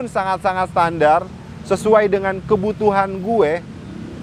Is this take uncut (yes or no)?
yes